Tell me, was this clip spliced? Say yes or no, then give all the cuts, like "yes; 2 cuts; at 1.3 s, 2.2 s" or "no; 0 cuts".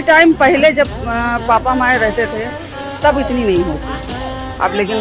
no; 0 cuts